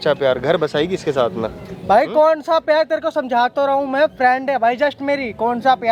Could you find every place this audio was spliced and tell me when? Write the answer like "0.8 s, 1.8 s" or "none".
none